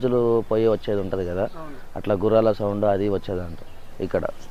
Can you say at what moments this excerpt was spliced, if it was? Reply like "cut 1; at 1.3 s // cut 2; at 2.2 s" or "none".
none